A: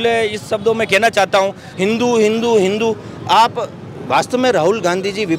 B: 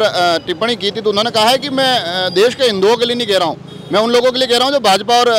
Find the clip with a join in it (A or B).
A